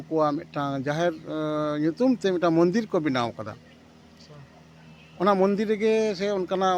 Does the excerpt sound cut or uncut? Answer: uncut